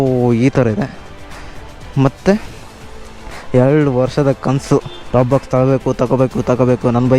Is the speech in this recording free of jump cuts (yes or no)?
yes